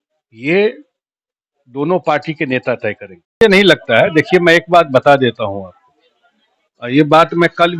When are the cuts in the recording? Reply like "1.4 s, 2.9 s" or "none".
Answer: 3.4 s